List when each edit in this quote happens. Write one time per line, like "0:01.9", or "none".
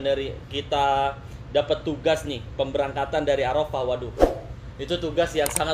none